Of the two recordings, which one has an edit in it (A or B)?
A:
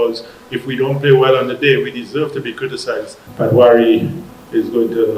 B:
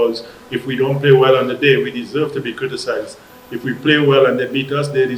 A